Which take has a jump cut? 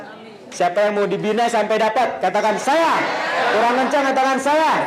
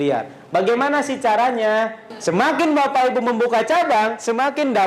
second; 1 cut; at 2.1 s

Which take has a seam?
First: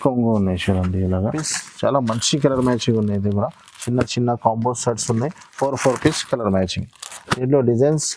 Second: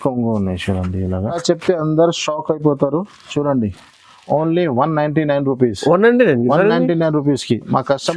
second; 1 cut; at 1.4 s

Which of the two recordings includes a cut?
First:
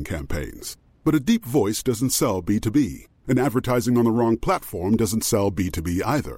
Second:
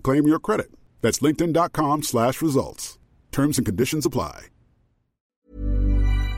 second; 1 cut; at 5.4 s

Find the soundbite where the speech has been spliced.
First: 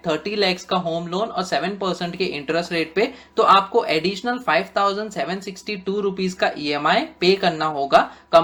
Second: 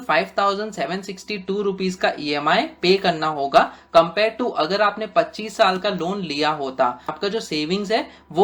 second; 1 cut; at 7.1 s

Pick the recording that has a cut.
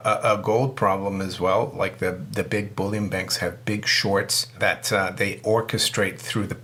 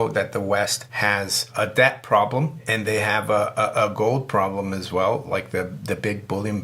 second; 2 cuts; at 1.1 s, 2.6 s

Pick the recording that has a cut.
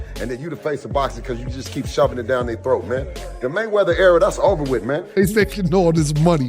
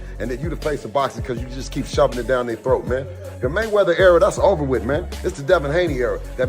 first; 1 cut; at 5.2 s

